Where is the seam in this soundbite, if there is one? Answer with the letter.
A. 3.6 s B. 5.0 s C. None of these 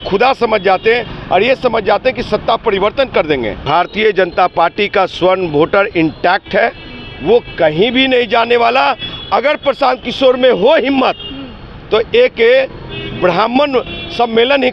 A